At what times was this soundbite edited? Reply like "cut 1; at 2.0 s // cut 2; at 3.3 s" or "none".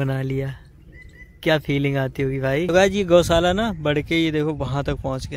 cut 1; at 2.7 s